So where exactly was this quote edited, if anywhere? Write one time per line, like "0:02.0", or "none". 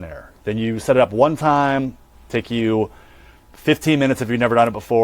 0:03.5